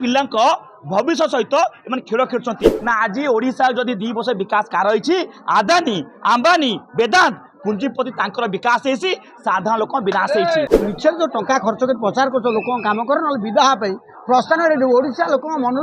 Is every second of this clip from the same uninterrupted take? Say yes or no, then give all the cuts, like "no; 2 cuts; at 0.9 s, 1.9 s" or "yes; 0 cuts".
no; 2 cuts; at 2.7 s, 10.7 s